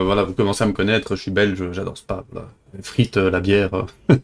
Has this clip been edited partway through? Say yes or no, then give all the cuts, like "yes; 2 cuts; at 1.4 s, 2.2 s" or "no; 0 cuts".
no; 0 cuts